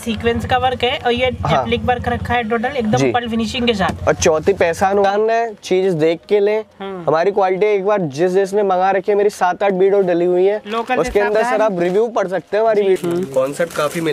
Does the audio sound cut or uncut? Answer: cut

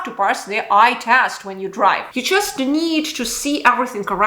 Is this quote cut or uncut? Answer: cut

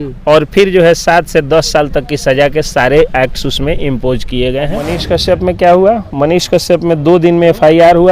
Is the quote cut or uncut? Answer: cut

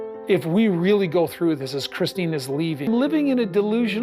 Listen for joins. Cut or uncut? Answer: cut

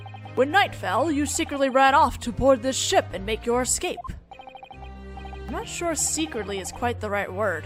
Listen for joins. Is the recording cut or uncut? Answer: uncut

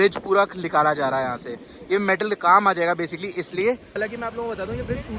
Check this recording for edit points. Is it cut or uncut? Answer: cut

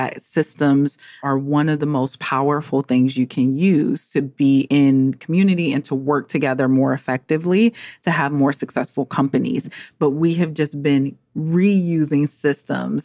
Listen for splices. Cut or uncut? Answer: cut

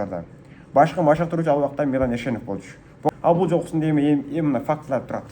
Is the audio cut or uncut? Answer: cut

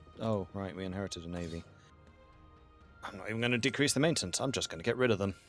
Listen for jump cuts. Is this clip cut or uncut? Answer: uncut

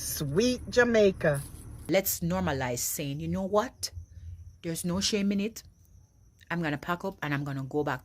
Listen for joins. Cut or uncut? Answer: cut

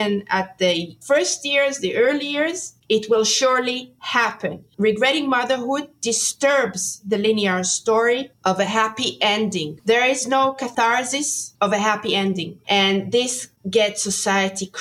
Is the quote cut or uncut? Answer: cut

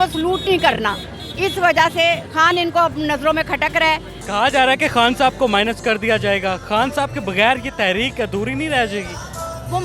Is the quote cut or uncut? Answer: uncut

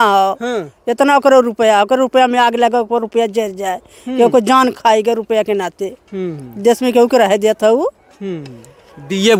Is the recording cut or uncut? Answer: uncut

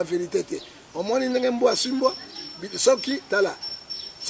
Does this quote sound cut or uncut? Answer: uncut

